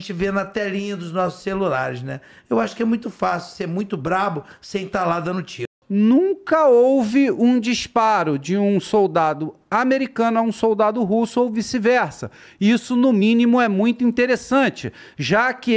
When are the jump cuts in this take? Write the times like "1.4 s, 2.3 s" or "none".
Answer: 5.7 s